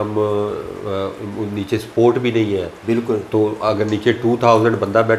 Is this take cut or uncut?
uncut